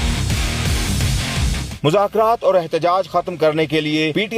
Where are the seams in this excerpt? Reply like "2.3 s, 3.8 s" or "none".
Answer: 1.9 s